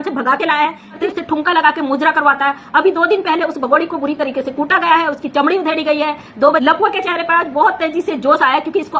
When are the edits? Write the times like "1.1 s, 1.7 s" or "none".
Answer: 1.0 s, 6.6 s